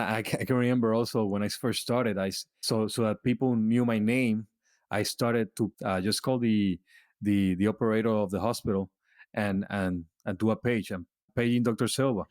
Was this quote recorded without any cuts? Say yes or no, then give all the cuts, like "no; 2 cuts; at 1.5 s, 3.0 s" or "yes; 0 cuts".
no; 2 cuts; at 2.5 s, 5.8 s